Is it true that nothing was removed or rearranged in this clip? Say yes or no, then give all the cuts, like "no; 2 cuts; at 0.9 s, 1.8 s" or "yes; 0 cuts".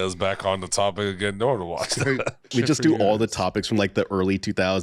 no; 1 cut; at 2.5 s